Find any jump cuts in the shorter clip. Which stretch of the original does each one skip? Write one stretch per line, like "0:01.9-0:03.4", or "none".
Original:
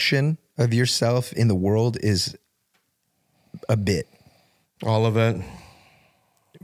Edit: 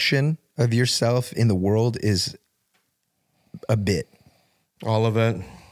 none